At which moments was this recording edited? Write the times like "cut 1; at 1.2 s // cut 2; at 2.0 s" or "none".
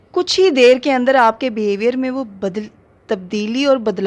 none